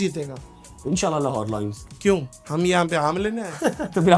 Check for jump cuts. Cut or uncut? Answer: cut